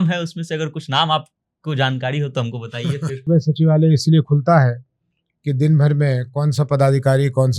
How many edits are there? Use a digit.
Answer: 1